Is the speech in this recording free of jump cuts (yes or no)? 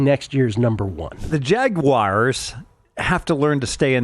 no